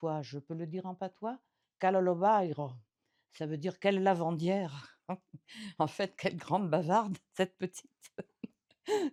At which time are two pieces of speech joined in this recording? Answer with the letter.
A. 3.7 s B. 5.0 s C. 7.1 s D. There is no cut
D